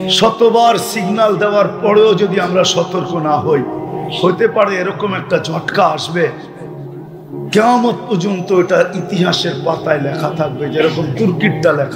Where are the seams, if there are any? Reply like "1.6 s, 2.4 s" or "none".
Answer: none